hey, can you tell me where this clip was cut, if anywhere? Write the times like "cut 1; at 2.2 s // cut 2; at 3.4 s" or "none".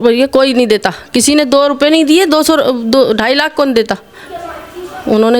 none